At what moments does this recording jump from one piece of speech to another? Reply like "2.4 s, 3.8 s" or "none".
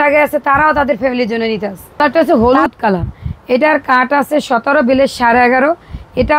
2.0 s